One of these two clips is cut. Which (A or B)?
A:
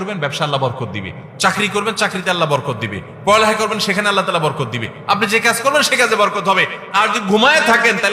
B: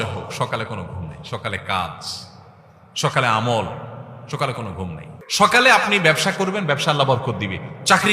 B